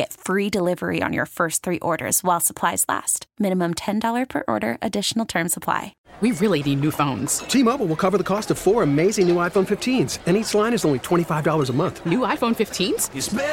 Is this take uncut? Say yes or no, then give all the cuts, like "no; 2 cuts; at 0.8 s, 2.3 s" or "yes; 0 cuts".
no; 1 cut; at 5.9 s